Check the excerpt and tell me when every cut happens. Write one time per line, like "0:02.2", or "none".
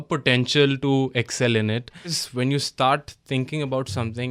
0:02.2